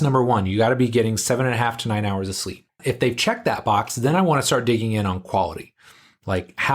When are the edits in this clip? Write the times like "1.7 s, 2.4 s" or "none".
2.8 s